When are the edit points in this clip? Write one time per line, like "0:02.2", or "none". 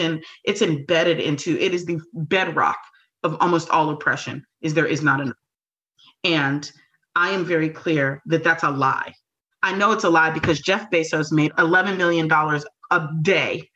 0:11.5